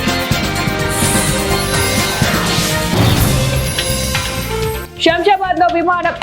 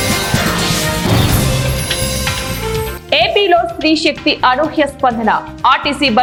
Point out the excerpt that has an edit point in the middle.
first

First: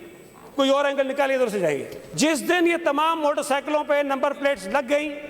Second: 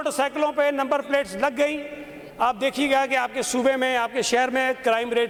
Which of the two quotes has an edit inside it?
first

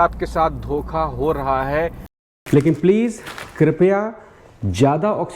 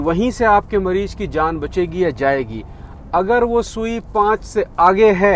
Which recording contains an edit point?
first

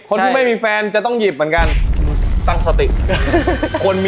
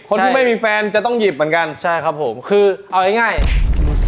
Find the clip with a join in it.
first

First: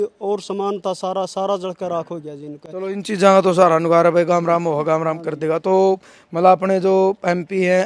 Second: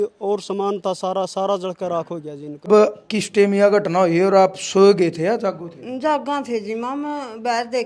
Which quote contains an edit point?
second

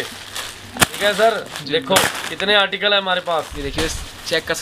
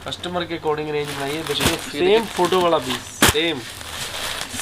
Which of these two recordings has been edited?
first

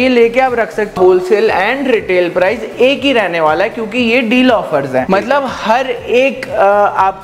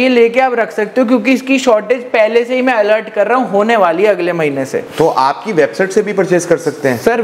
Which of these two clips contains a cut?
first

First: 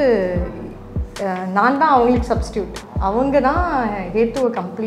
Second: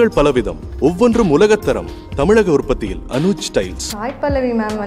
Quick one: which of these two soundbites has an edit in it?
second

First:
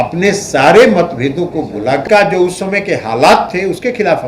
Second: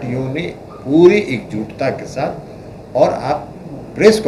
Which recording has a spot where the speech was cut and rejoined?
first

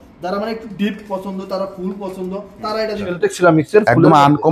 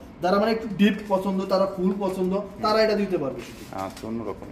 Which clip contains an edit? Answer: first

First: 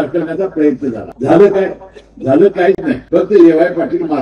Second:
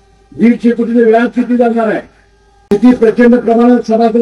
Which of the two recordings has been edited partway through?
first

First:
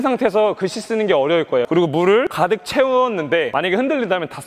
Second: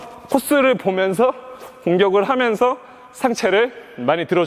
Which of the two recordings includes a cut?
first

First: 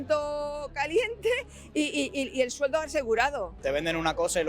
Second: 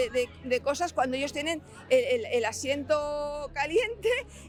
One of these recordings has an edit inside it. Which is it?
first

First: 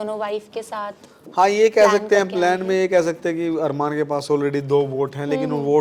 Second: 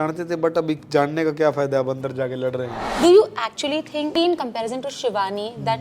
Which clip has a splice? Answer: second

